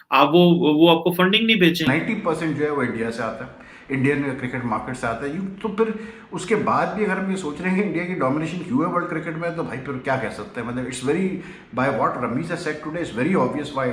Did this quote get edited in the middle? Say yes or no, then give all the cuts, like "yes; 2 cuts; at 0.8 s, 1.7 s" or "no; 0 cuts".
yes; 1 cut; at 1.9 s